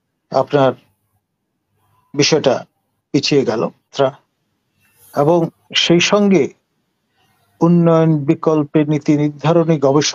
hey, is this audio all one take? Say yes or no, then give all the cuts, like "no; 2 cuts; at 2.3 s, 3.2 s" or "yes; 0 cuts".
no; 1 cut; at 3.9 s